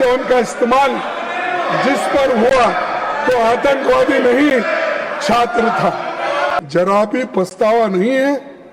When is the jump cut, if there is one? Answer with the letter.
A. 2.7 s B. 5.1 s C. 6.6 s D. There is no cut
C